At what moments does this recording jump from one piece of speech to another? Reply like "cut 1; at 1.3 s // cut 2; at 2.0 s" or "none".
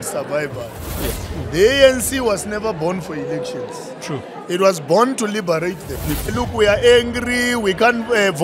cut 1; at 1.2 s // cut 2; at 6.3 s